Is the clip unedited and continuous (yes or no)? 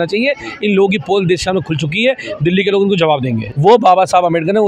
no